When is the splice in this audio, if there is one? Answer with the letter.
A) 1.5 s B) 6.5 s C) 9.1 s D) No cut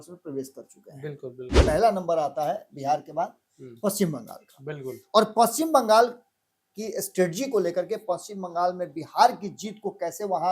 A